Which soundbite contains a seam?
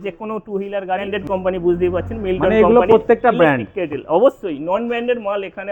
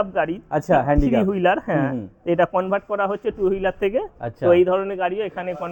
first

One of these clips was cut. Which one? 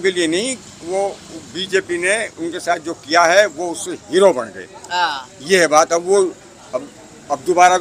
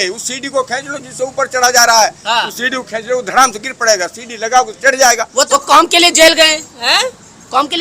second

